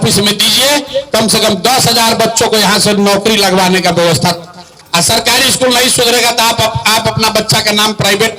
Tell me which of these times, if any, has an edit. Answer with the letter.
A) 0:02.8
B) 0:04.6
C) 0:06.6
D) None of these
B